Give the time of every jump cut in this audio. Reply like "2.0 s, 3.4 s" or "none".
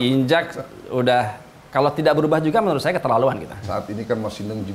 3.7 s